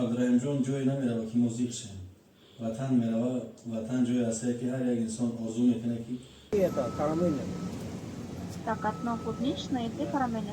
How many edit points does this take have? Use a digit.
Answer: 1